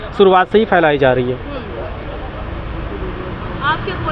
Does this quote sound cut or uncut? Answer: uncut